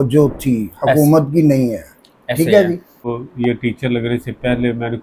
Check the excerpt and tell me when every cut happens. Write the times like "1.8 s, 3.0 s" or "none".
3.2 s